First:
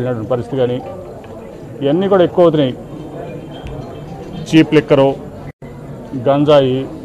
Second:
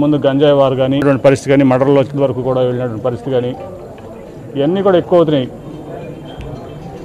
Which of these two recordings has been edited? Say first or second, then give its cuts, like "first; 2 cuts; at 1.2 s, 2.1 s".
second; 1 cut; at 1.0 s